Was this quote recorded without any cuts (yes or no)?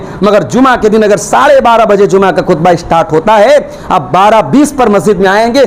yes